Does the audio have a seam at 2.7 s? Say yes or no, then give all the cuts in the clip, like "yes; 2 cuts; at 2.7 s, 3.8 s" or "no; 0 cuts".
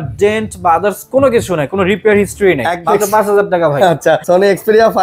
yes; 2 cuts; at 2.7 s, 4.2 s